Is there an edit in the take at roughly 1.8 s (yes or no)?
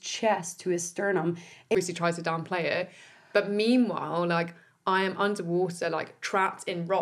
yes